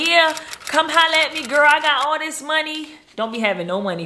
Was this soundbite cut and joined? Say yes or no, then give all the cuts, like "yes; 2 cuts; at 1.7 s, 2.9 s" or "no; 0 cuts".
no; 0 cuts